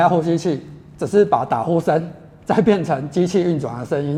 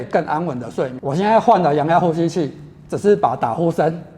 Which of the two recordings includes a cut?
second; 1 cut; at 1.0 s

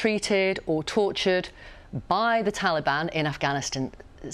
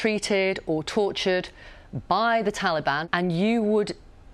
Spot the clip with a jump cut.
second; 1 cut; at 3.0 s

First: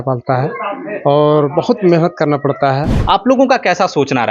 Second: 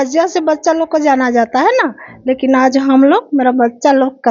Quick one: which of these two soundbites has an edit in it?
first; 1 cut; at 2.9 s

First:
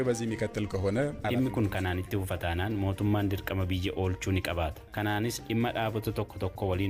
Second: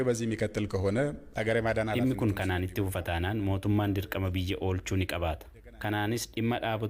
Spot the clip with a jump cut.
first; 2 cuts; at 1.2 s, 4.8 s

